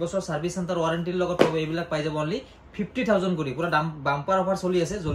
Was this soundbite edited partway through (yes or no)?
no